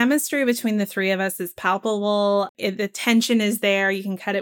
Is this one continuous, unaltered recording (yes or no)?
no